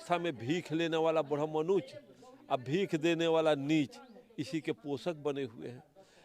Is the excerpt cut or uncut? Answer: uncut